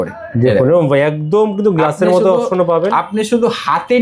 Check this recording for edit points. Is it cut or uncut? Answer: uncut